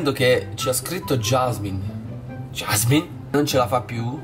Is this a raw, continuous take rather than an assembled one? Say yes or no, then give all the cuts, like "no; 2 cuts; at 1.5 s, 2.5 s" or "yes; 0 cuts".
no; 1 cut; at 3.3 s